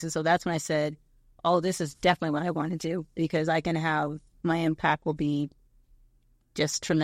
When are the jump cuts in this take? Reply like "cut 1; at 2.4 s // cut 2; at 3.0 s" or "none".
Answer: cut 1; at 4.4 s